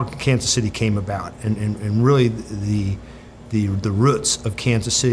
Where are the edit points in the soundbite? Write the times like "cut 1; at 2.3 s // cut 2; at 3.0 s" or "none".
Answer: none